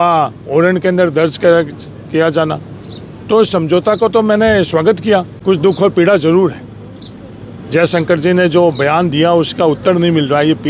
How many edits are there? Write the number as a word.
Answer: one